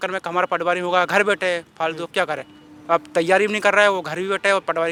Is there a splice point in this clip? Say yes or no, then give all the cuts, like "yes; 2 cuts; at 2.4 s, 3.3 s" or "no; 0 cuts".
no; 0 cuts